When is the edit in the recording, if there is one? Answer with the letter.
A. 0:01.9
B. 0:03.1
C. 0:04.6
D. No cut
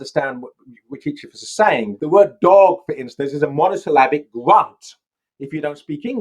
A